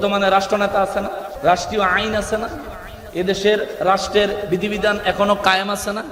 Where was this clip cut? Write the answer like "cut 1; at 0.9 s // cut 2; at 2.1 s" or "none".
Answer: cut 1; at 1.3 s